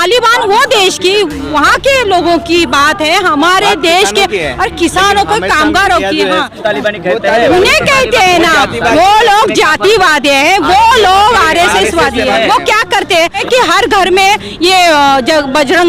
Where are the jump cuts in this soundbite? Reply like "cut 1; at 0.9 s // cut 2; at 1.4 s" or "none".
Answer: cut 1; at 6.6 s // cut 2; at 13.4 s